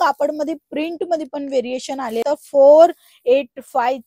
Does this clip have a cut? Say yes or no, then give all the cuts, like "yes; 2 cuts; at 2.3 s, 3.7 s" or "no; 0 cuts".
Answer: yes; 1 cut; at 2.2 s